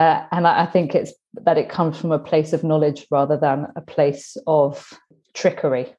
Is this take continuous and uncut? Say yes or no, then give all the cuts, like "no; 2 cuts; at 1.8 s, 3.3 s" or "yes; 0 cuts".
no; 1 cut; at 5.1 s